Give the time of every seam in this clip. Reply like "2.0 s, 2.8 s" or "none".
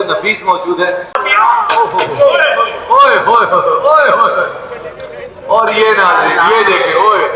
1.2 s